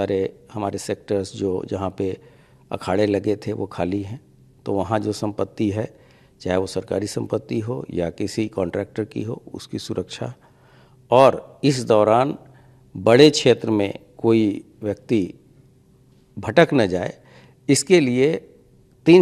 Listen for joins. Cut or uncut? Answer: uncut